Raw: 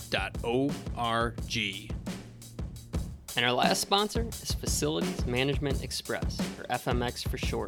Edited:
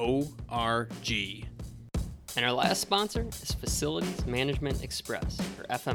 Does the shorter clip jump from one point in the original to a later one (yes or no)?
yes